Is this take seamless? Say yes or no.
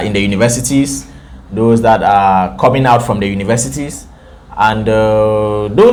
yes